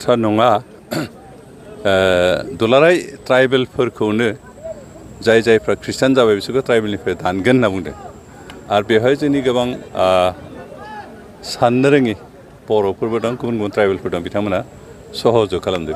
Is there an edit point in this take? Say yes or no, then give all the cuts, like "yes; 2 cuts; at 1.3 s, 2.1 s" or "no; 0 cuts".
no; 0 cuts